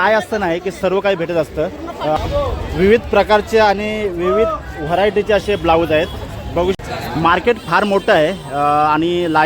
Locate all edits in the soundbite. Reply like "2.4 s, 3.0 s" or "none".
2.2 s, 6.8 s